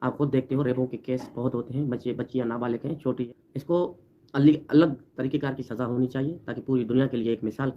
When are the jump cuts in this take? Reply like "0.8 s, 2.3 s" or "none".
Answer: 3.3 s